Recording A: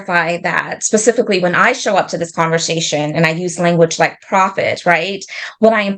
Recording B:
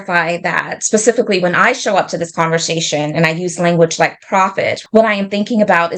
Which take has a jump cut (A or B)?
B